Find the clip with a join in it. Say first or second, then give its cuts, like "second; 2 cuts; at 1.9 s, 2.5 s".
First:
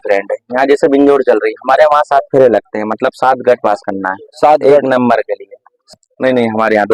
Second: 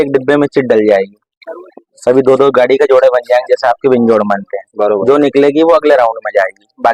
first; 1 cut; at 5.9 s